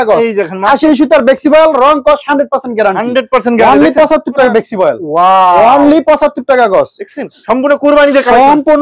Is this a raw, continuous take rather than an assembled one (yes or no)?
no